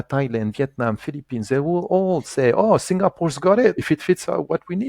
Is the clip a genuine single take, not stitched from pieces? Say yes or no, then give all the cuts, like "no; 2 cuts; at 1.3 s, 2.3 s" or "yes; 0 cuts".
no; 1 cut; at 3.8 s